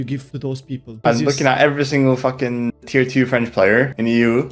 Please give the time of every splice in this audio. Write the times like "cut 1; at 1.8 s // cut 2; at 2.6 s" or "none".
cut 1; at 0.9 s